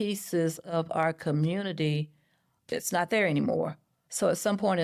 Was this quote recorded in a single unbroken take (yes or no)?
no